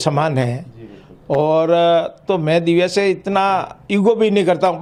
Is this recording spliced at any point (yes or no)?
no